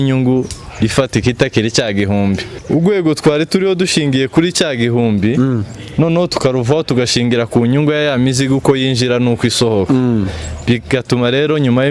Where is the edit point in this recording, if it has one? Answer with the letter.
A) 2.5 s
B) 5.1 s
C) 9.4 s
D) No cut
A